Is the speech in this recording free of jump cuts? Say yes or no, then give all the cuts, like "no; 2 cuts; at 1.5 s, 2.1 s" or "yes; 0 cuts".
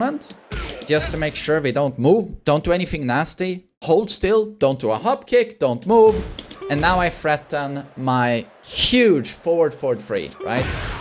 yes; 0 cuts